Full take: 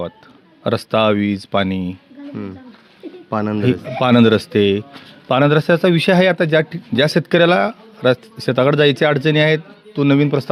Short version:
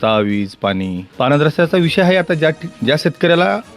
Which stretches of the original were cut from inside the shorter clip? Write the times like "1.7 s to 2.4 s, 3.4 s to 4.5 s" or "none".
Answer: 1.9 s to 5.1 s